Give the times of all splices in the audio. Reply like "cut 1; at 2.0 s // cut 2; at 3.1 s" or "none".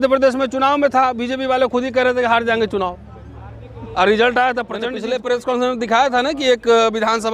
cut 1; at 5.0 s